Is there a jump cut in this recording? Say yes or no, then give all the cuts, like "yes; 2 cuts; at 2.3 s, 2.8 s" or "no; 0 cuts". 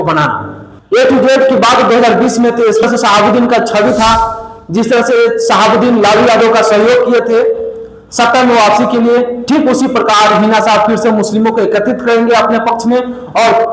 yes; 1 cut; at 2.8 s